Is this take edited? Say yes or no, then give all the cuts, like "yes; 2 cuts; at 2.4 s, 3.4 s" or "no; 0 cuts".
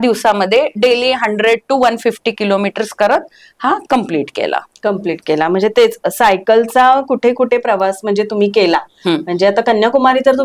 no; 0 cuts